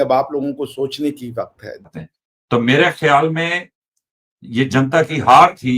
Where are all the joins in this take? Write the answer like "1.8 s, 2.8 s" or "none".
1.8 s